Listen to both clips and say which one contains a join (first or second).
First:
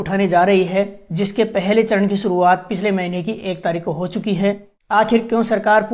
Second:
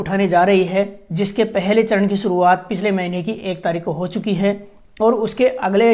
first